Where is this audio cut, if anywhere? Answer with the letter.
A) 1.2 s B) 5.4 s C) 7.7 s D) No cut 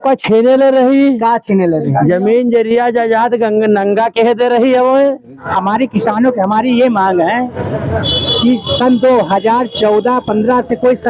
B